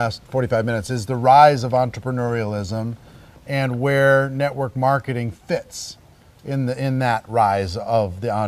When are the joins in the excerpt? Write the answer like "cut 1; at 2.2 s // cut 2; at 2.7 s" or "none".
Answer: cut 1; at 3.7 s